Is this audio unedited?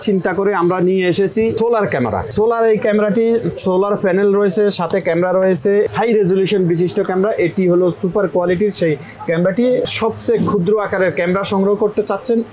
no; 3 cuts; at 1.8 s, 5.9 s, 9.9 s

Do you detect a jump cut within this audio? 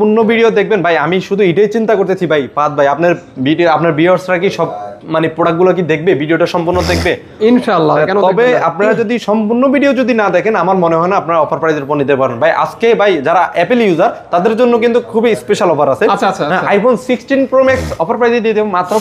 no; 0 cuts

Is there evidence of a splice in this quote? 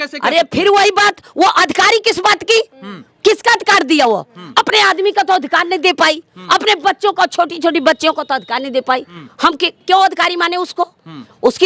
yes; 1 cut; at 9.1 s

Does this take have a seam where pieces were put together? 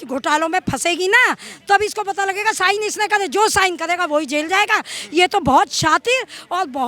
no; 0 cuts

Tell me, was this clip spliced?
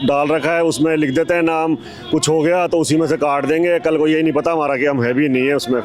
no; 0 cuts

